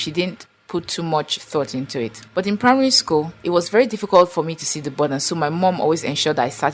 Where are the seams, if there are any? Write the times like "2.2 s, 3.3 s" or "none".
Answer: 2.2 s, 3.4 s